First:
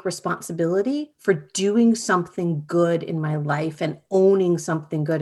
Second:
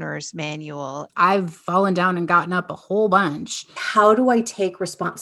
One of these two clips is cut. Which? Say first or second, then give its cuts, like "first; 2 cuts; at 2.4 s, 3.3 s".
second; 2 cuts; at 1.0 s, 3.8 s